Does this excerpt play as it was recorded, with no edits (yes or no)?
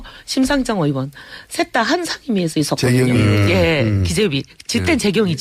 yes